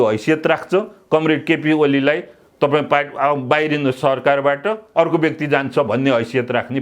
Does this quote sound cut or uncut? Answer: uncut